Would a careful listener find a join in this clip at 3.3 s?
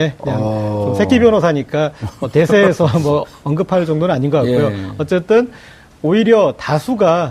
no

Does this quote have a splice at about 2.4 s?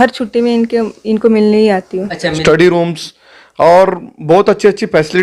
yes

